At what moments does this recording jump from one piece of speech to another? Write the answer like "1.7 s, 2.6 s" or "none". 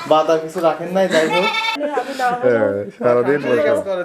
1.8 s